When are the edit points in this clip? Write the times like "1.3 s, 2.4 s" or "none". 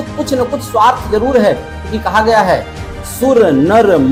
none